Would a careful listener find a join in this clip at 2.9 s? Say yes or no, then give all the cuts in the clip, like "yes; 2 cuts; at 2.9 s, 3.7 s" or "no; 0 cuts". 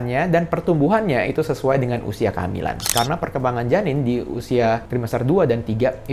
yes; 1 cut; at 2.9 s